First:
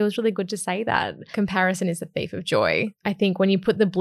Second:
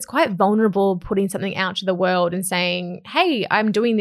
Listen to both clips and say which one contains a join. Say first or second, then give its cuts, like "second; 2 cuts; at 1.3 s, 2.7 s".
first; 2 cuts; at 1.3 s, 3.0 s